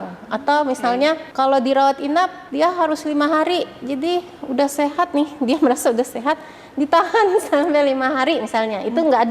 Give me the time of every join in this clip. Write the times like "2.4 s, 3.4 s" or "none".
1.3 s, 2.4 s